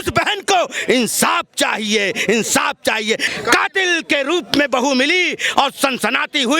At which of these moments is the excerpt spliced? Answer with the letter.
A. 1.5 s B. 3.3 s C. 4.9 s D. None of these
B